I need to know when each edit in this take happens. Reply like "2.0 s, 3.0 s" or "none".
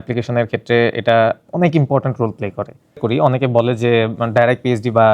3.0 s